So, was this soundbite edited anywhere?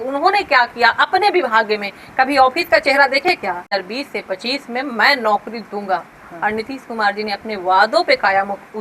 yes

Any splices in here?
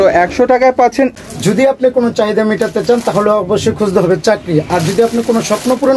yes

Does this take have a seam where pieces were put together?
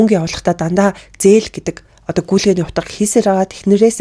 no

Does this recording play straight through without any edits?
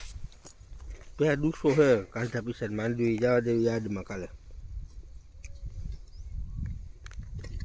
yes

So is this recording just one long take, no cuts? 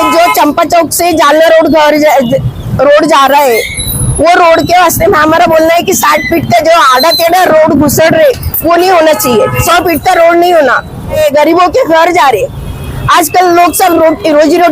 no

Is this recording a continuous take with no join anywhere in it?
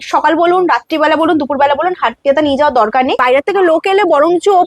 no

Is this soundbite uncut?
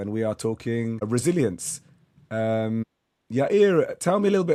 yes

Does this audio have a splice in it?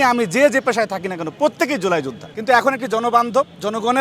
yes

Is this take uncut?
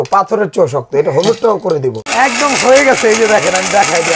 no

